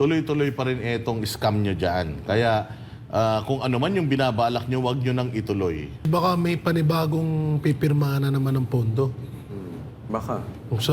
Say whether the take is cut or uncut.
cut